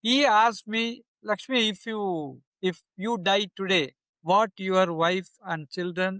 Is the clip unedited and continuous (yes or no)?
yes